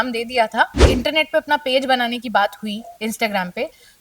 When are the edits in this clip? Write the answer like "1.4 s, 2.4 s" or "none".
0.9 s